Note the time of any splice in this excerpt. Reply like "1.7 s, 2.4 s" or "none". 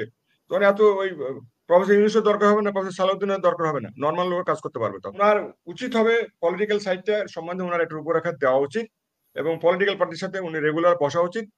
5.0 s

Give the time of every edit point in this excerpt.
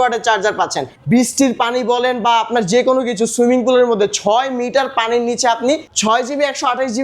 0.9 s, 5.9 s

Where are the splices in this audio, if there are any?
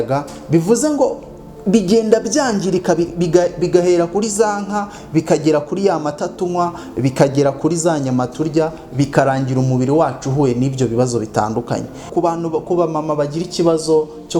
12.0 s

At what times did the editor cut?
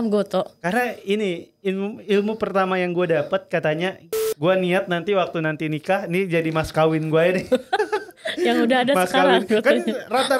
4.1 s

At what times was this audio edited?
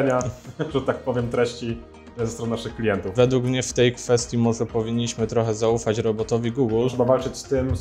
3.1 s, 6.9 s

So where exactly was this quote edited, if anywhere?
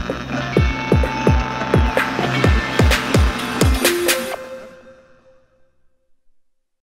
5.8 s

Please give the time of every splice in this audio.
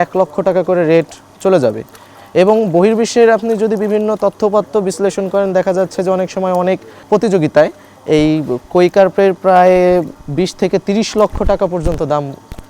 7.0 s, 10.2 s

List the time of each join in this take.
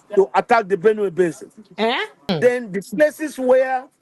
2.3 s

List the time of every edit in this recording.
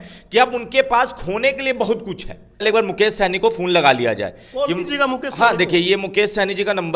2.6 s

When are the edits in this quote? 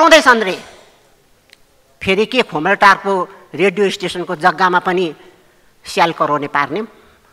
none

